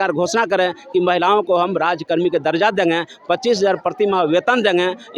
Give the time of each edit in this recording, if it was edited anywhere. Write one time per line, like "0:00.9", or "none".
none

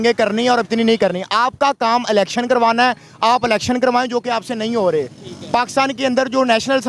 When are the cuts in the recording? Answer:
none

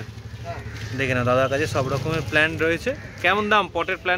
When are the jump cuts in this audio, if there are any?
none

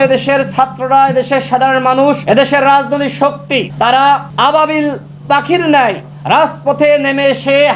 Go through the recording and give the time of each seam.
0:02.2
0:03.7
0:04.3

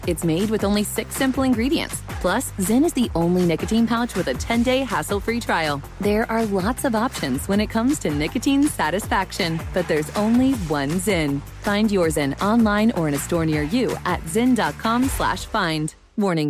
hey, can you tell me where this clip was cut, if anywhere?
none

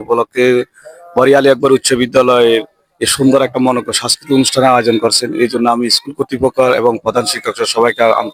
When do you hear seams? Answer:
none

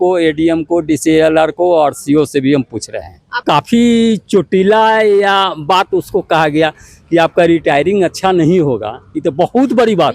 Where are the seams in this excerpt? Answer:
0:03.4

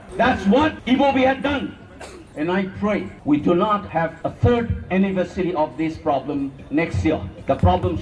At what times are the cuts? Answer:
0:02.3
0:04.2

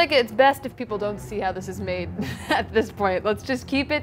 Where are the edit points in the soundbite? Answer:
none

